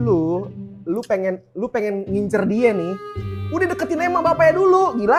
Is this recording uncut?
yes; 0 cuts

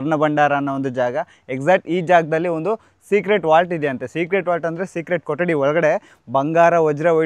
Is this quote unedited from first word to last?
yes; 0 cuts

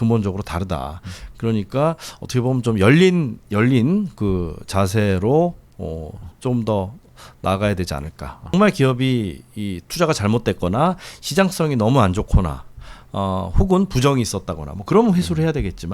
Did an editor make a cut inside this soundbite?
yes; 1 cut; at 8.5 s

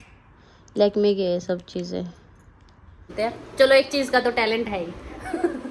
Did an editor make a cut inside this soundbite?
yes; 1 cut; at 3.1 s

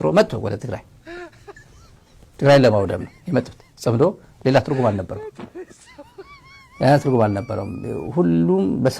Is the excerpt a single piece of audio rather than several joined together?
yes; 0 cuts

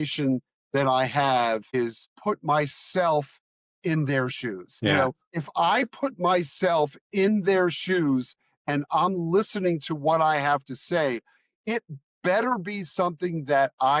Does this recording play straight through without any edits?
no; 2 cuts; at 2.0 s, 5.0 s

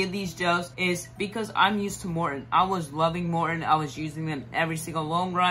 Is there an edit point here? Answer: no; 0 cuts

